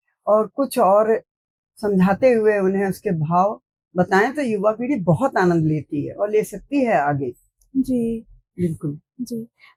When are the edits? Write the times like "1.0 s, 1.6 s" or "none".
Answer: none